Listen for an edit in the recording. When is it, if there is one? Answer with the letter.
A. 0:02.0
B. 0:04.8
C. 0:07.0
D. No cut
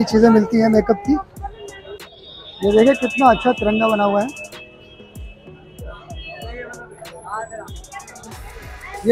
A